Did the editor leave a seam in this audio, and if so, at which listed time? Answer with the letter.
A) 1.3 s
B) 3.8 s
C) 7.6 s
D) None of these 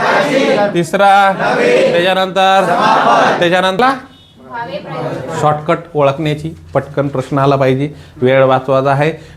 B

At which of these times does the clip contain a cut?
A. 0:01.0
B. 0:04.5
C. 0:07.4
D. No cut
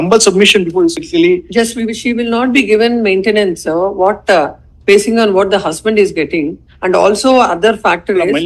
A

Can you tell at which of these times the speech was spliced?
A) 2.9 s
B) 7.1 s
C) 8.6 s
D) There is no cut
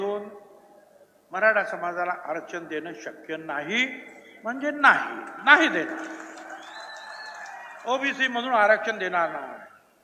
D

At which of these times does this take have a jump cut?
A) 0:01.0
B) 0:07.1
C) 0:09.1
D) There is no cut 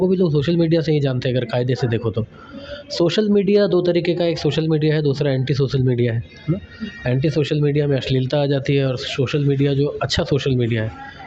D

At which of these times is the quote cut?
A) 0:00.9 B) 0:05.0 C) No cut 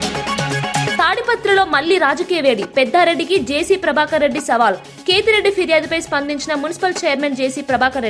A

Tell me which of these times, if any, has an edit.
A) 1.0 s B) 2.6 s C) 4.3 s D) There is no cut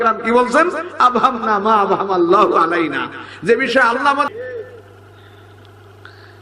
C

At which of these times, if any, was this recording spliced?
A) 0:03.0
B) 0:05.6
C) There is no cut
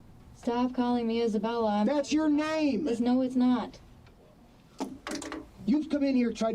B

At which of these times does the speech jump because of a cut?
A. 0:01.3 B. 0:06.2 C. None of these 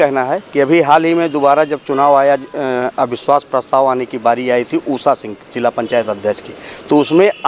C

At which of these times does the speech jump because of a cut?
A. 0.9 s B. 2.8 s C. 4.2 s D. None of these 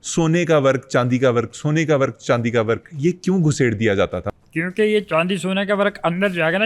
C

